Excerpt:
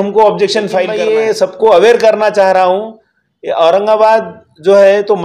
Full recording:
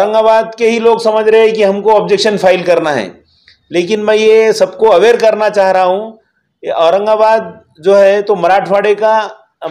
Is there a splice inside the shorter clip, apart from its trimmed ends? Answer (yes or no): yes